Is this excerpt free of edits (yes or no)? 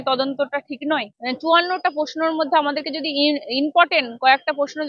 no